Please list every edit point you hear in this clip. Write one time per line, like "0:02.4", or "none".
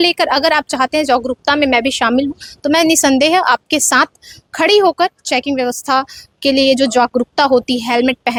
none